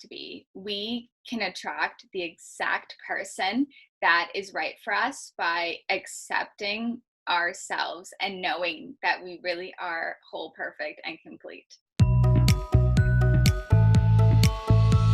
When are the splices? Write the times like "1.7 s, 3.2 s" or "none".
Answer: 11.8 s